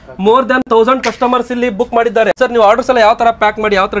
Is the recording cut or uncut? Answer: uncut